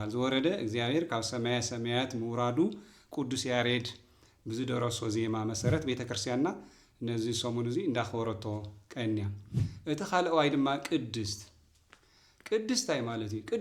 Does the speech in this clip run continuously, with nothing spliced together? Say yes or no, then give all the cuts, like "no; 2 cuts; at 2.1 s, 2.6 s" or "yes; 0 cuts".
yes; 0 cuts